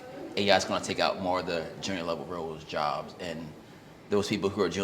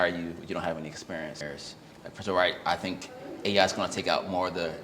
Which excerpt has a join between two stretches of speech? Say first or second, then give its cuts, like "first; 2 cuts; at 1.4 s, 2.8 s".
second; 1 cut; at 1.4 s